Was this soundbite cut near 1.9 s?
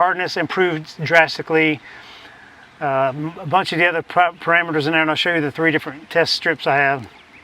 no; 0 cuts

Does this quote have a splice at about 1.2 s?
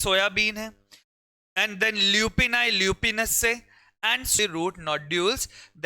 no; 1 cut; at 4.3 s

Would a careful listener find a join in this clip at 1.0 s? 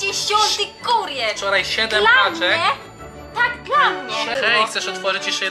no; 1 cut; at 4.3 s

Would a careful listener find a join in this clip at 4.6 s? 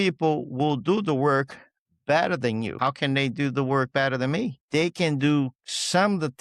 yes; 2 cuts; at 2.7 s, 4.6 s

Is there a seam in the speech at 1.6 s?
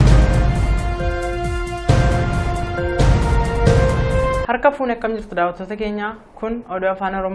yes; 1 cut; at 1.6 s

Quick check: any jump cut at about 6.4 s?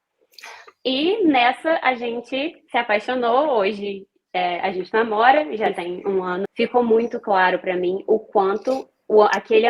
yes; 1 cut; at 6.4 s

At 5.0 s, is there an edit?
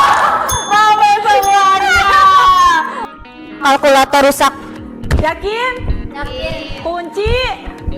no; 1 cut; at 3.0 s

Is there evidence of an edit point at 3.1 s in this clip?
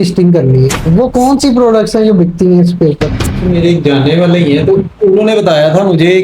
yes; 1 cut; at 3.1 s

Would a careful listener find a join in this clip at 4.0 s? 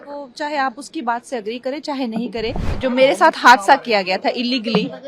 no; 1 cut; at 2.6 s

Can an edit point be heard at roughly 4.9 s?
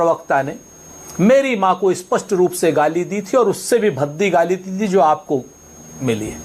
no; 0 cuts

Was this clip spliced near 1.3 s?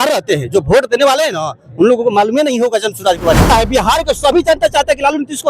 no; 1 cut; at 3.5 s

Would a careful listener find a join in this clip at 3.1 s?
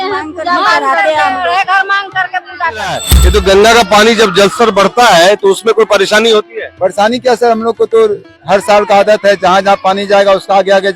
yes; 1 cut; at 3.1 s

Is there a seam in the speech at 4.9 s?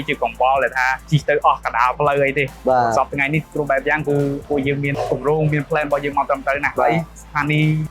yes; 1 cut; at 4.9 s

